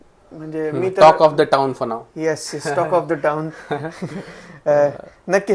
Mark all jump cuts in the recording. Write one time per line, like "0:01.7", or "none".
none